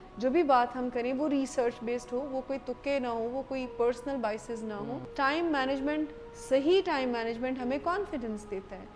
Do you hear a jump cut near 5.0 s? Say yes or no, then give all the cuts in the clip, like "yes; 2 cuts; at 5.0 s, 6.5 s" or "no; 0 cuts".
yes; 1 cut; at 5.0 s